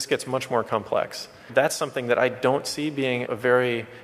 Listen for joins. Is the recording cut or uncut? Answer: cut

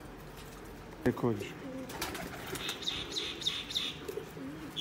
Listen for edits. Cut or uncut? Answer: cut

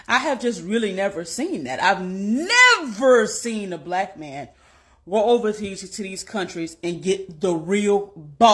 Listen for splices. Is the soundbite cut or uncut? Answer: cut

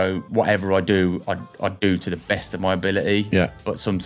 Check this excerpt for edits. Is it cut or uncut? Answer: uncut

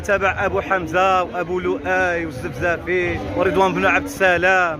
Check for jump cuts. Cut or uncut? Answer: cut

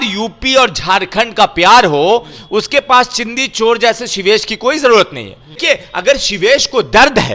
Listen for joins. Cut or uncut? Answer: cut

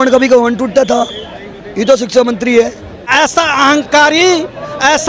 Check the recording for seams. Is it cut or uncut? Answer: cut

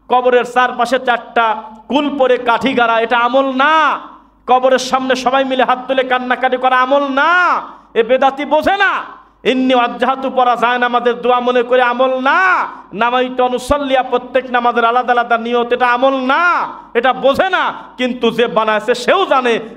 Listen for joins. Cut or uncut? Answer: uncut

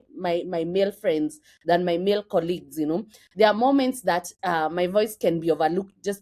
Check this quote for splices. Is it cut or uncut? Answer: uncut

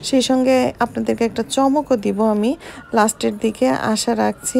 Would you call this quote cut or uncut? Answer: uncut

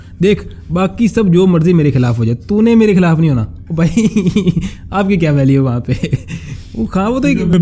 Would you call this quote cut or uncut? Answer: uncut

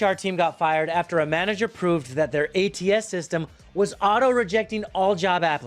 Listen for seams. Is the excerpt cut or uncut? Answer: uncut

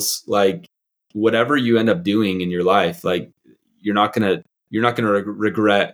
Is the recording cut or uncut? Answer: cut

